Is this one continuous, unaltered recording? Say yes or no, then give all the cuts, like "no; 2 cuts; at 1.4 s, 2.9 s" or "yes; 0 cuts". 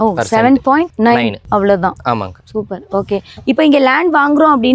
no; 1 cut; at 3.3 s